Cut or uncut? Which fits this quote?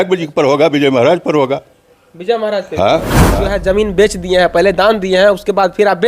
cut